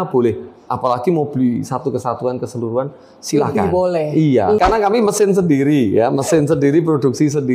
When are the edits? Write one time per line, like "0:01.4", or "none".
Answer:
0:04.6